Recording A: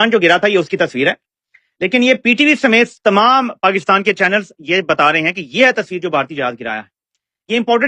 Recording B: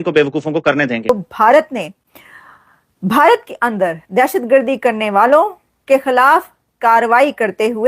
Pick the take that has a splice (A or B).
B